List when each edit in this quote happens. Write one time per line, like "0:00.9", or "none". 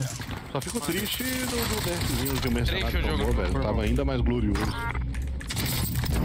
none